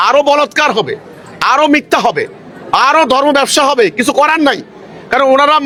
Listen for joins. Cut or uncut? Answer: uncut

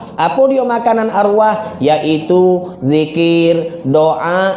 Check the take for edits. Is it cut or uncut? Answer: uncut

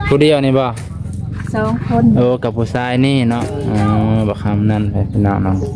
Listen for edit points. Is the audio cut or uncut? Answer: uncut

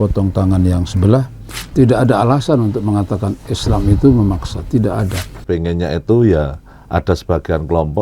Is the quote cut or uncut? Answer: cut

